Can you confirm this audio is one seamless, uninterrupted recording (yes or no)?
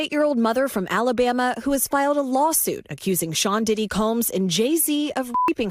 yes